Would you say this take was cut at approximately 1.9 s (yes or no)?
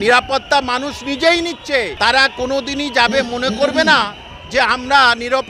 yes